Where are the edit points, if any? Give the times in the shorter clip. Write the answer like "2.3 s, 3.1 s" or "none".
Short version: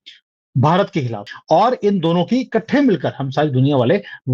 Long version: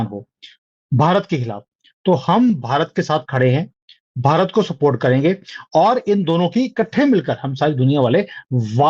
1.3 s